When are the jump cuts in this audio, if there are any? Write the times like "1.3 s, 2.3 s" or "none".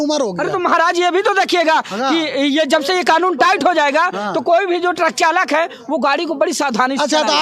none